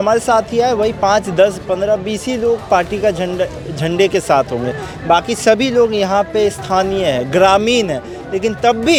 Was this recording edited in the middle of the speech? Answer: no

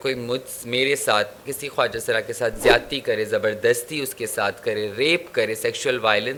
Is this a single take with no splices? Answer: yes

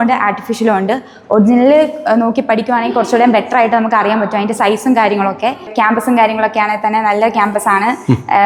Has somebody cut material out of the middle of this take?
no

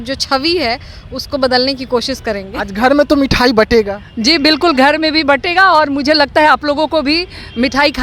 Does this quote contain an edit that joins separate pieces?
no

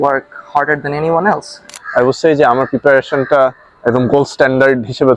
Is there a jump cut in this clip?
yes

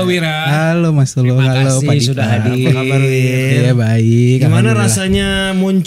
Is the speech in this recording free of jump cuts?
yes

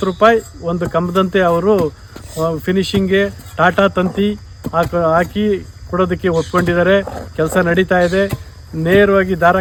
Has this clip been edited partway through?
no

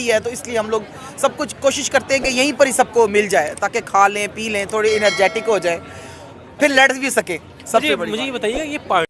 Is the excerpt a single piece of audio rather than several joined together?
yes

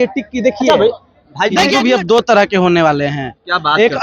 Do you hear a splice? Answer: yes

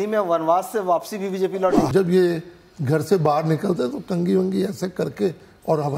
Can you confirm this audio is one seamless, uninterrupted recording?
no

